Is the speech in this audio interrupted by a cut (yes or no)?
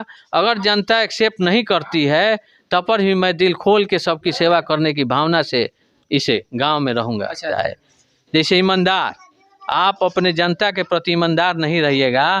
yes